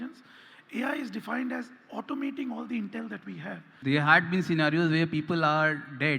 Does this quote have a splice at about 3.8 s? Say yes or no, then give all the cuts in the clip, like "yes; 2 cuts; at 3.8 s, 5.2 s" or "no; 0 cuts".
yes; 1 cut; at 3.8 s